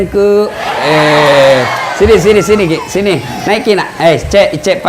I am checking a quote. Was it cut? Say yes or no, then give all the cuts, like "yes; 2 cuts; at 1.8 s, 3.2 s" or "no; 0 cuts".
no; 0 cuts